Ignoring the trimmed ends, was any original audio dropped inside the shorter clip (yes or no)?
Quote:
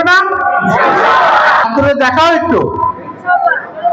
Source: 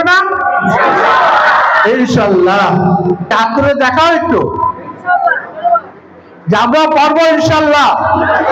yes